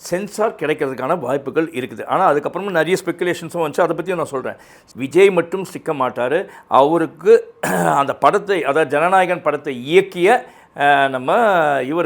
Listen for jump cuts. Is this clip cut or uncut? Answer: cut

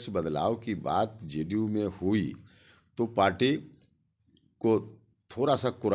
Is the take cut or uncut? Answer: uncut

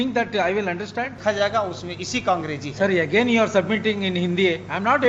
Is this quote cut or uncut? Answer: cut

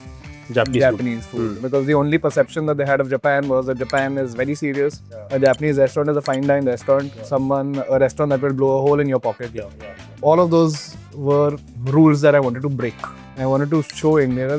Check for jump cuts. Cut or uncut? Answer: cut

